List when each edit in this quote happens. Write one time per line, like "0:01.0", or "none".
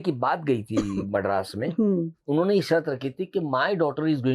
0:02.2